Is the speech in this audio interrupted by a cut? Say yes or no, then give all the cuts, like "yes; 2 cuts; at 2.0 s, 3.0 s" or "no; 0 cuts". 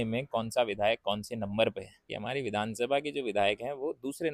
yes; 1 cut; at 2.1 s